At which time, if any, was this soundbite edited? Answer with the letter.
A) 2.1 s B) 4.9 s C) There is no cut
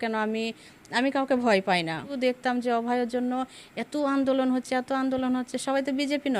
A